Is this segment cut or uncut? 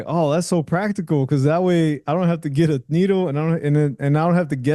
uncut